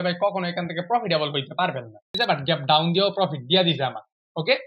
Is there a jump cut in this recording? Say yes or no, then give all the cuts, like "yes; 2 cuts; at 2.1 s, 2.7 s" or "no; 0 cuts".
yes; 1 cut; at 2.1 s